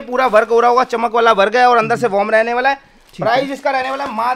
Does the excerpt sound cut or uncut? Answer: uncut